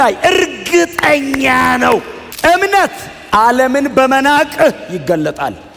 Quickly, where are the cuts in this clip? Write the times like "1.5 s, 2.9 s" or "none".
2.2 s

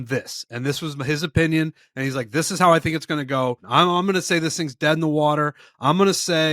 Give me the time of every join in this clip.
3.6 s

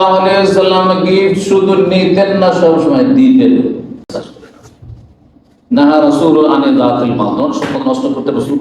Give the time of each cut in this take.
4.1 s

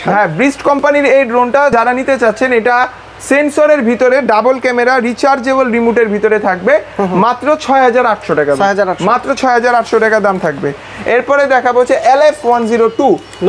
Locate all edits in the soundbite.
none

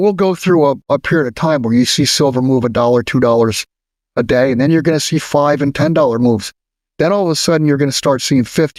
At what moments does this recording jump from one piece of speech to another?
none

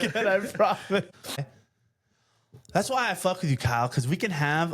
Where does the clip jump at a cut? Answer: 1.4 s

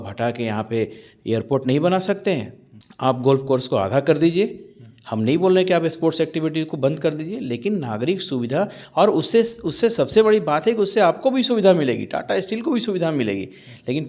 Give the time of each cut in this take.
none

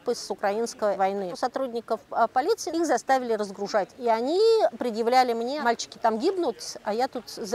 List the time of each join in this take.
1.3 s, 2.7 s, 3.9 s, 5.5 s

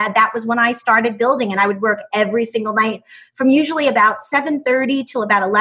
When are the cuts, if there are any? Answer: none

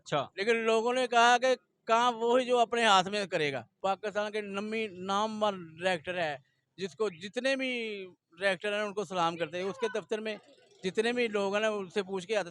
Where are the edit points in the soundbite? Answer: 3.7 s

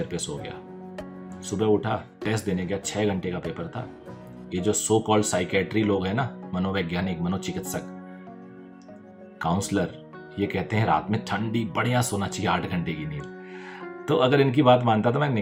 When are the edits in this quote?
none

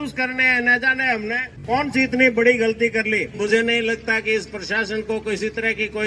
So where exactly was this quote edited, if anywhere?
1.5 s, 3.3 s

